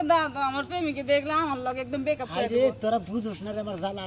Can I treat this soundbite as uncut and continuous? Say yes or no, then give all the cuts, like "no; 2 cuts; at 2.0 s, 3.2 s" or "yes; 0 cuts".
yes; 0 cuts